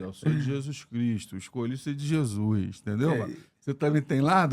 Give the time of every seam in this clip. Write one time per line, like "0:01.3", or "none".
none